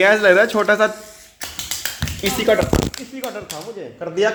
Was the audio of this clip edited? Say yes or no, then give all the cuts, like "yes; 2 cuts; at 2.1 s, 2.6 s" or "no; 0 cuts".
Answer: no; 0 cuts